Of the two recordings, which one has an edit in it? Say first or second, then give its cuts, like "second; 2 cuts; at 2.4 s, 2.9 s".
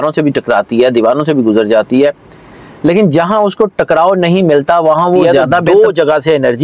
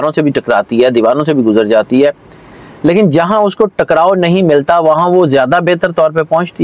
first; 1 cut; at 5.6 s